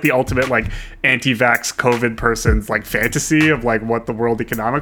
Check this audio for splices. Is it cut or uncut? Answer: uncut